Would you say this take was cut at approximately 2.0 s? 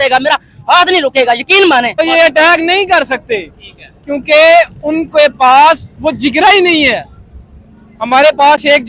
yes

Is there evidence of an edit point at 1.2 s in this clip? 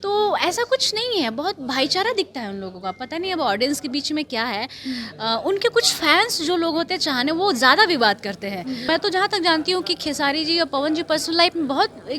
no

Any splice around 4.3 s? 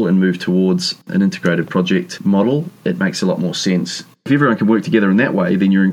yes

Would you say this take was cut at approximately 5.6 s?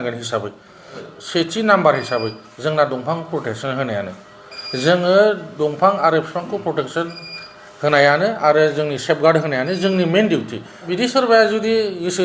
no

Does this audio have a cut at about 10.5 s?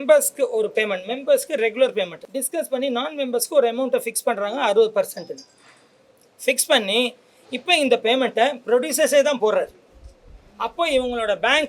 no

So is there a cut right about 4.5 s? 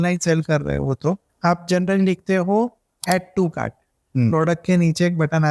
no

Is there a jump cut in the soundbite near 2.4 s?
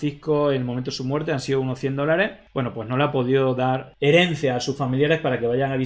yes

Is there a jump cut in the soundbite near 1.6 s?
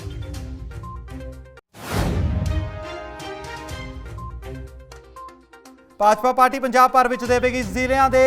yes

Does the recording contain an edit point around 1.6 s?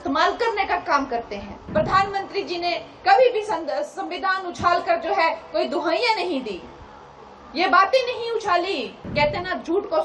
yes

